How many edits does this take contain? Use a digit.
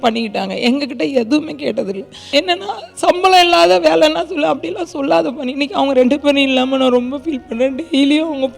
1